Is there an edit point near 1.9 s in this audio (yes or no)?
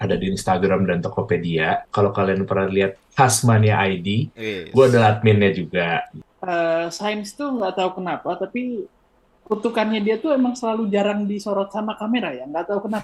yes